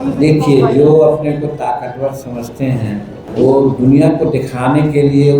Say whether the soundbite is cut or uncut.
cut